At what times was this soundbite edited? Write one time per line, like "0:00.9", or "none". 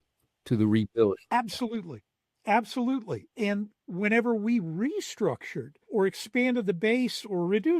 0:03.3
0:05.9